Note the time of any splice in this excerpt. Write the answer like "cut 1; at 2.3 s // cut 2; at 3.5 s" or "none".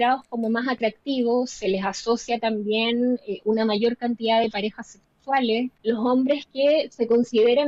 cut 1; at 5.7 s